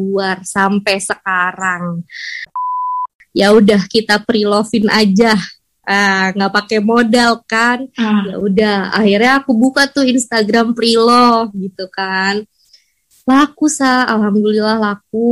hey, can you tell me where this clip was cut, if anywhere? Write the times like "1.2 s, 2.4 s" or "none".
2.7 s

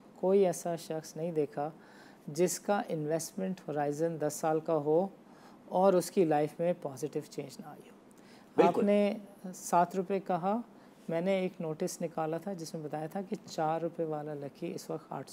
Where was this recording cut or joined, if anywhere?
none

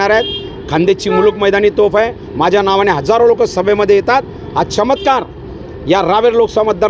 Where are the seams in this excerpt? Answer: none

